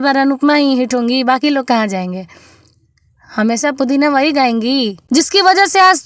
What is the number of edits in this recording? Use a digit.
1